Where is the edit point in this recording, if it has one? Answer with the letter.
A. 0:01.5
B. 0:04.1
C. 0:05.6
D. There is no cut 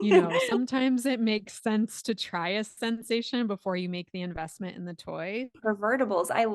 C